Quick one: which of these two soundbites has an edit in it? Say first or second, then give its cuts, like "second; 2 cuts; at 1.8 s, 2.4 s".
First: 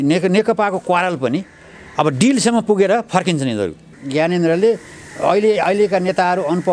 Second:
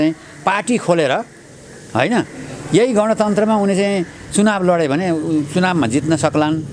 first; 1 cut; at 4.0 s